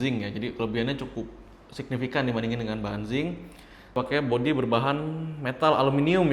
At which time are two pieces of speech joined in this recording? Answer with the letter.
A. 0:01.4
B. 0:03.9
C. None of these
B